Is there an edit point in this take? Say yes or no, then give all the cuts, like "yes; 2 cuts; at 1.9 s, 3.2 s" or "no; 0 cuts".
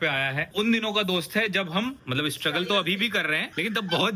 no; 0 cuts